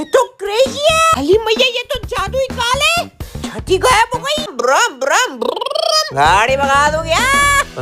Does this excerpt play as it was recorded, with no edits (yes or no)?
no